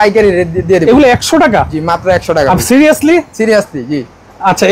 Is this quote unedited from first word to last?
yes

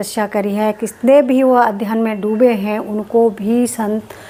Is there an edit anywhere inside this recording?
no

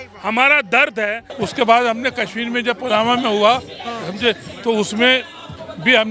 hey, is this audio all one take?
no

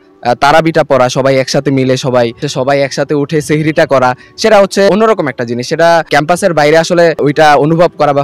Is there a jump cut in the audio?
yes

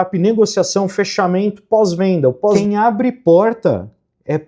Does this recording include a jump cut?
yes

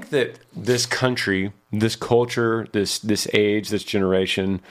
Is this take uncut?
yes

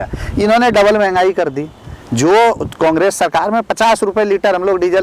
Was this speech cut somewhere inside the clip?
no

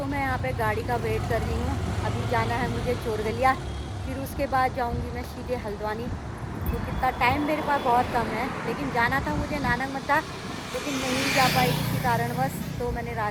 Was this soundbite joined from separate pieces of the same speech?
no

